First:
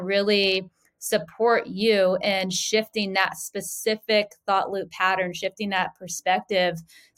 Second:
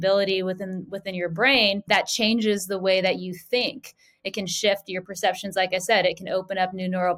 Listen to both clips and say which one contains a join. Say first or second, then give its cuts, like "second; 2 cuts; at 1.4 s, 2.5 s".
second; 1 cut; at 1.8 s